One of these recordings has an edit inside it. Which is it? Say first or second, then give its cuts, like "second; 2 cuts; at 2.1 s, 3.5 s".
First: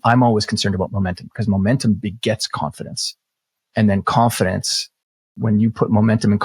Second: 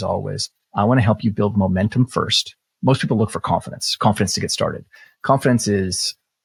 first; 2 cuts; at 0.9 s, 3.0 s